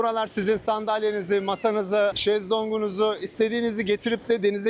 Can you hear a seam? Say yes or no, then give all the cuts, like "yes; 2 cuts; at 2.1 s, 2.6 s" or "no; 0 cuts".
yes; 1 cut; at 2.2 s